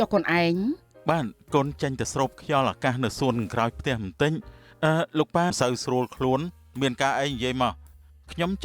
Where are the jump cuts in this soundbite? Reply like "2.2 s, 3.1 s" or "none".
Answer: 5.5 s